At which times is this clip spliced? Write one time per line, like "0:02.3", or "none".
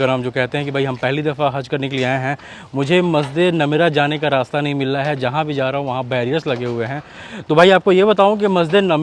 none